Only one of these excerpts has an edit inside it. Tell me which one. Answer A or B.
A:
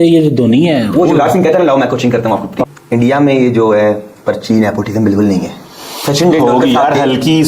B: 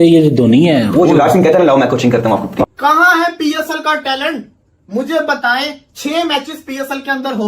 B